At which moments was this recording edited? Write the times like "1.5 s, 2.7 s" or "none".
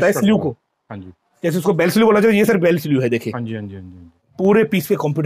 4.3 s